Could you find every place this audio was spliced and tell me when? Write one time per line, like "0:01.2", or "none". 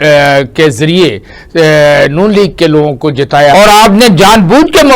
0:03.5